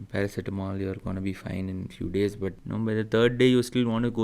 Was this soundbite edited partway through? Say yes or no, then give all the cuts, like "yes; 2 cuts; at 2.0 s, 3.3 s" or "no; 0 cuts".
yes; 1 cut; at 2.6 s